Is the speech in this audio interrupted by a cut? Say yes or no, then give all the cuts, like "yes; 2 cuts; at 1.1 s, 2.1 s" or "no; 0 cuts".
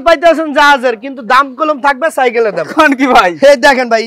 no; 0 cuts